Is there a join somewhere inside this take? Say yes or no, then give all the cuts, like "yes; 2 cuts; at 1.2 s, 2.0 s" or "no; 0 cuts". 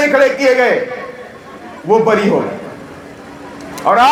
no; 0 cuts